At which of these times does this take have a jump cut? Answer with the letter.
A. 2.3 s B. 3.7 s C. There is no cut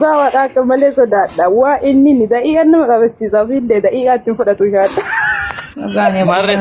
C